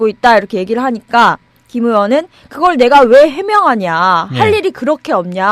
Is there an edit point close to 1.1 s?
no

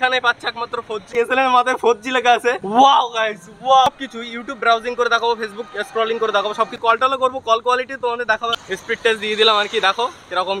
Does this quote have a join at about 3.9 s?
yes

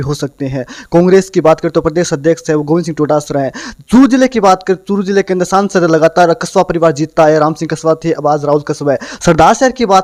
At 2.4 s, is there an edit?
no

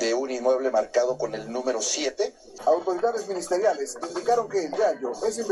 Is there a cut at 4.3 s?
no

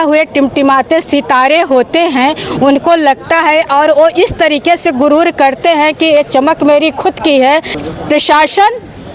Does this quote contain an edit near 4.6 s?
no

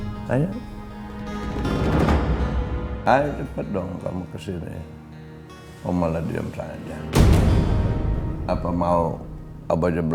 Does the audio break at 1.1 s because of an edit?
no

